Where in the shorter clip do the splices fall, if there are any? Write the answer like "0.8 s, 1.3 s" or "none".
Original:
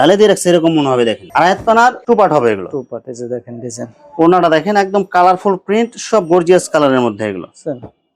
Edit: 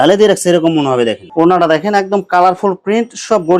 1.2 s

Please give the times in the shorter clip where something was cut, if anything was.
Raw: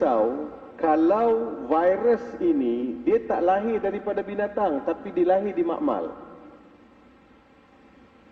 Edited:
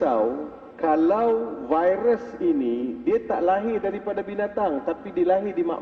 none

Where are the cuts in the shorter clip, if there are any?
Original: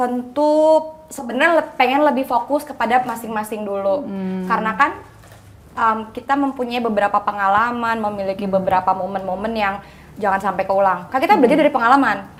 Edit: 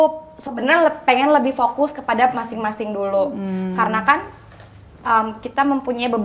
none

